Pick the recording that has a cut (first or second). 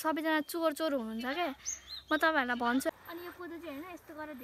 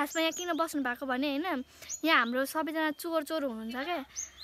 first